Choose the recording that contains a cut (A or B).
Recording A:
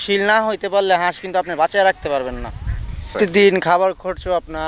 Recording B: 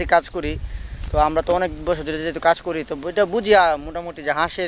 A